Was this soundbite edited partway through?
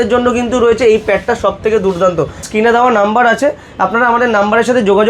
yes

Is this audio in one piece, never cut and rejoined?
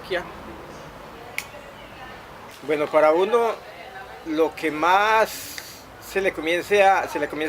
yes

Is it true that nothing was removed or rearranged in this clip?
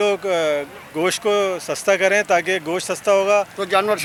yes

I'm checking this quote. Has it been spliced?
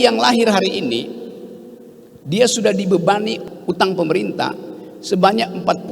yes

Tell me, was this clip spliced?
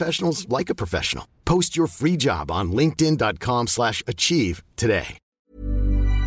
yes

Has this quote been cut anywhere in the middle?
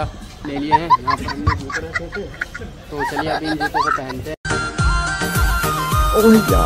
no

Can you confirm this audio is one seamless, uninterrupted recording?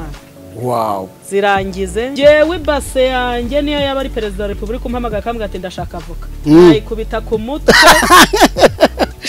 no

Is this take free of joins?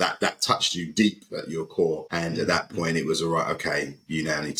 yes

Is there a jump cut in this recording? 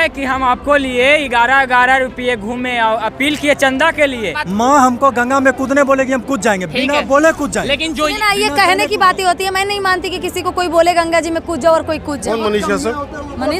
yes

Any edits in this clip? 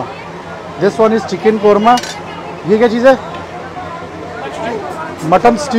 no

